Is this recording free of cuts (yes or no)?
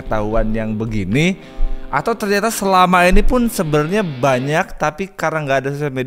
yes